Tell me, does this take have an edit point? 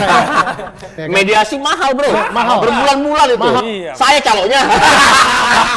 no; 0 cuts

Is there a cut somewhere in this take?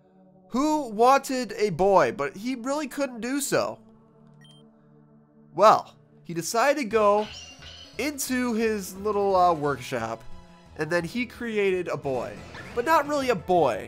no; 0 cuts

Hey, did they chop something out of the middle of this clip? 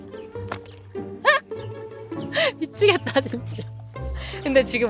no; 0 cuts

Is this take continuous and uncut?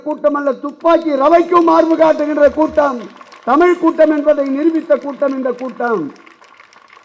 yes; 0 cuts

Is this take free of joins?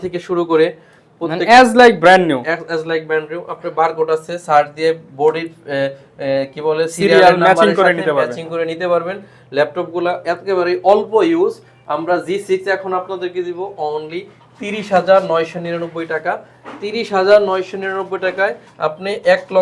yes; 0 cuts

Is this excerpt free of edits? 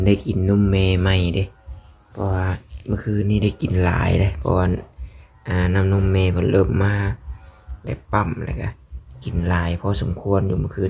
yes; 0 cuts

